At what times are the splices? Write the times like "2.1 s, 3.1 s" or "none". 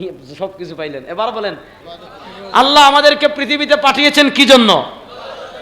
1.8 s